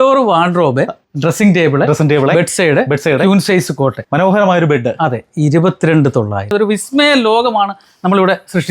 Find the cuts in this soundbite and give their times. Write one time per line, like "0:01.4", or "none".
0:06.4

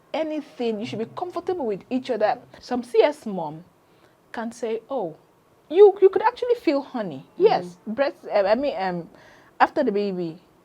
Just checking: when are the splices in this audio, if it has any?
0:02.5

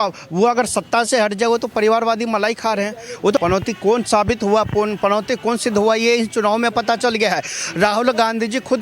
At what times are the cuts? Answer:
0:03.4

